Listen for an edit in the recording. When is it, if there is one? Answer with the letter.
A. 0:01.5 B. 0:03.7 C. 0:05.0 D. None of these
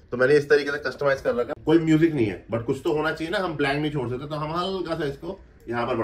A